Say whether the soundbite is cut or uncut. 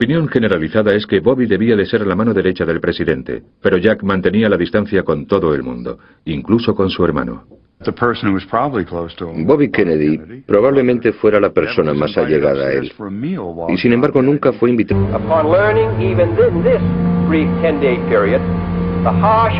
uncut